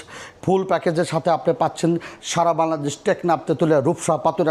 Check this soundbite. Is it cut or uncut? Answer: uncut